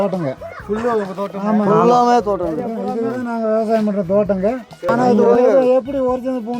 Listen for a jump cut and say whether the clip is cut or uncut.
cut